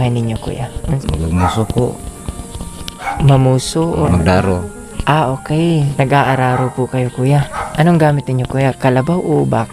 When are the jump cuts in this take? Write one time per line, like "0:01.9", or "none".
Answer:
0:01.0
0:04.1
0:05.9